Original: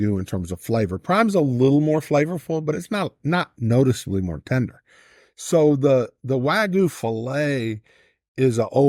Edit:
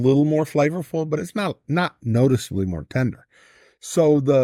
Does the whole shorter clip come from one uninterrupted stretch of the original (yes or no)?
yes